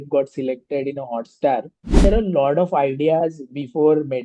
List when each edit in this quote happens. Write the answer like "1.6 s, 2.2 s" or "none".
2.0 s